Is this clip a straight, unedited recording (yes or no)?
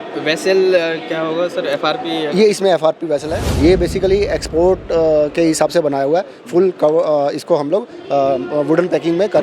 no